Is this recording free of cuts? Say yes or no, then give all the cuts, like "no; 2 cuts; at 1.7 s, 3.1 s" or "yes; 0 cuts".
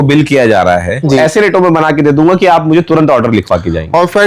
no; 1 cut; at 1.2 s